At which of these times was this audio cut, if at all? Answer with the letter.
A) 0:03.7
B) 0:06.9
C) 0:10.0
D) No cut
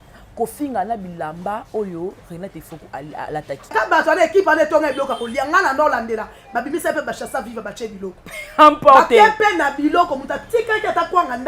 A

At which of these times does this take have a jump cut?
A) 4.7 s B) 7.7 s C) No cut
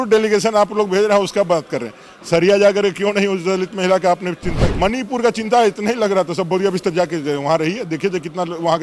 A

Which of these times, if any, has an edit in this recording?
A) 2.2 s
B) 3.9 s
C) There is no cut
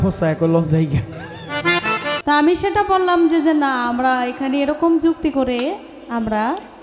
A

